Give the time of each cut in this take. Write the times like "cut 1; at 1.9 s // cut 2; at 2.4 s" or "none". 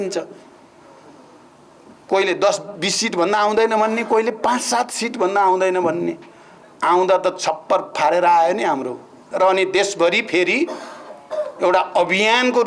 cut 1; at 9.3 s